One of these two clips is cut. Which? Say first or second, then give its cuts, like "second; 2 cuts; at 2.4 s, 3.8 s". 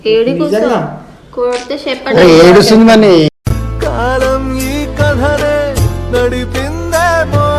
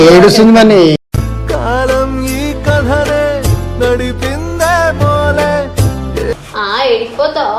second; 1 cut; at 6.3 s